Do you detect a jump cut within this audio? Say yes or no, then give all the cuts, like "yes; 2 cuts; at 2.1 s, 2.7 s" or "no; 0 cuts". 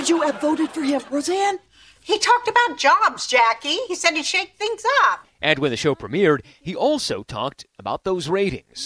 no; 0 cuts